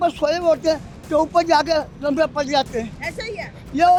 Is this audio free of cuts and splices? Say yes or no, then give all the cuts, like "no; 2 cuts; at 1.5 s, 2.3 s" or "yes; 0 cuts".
yes; 0 cuts